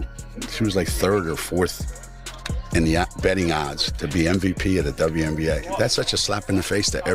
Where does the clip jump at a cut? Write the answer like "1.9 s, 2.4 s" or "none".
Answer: none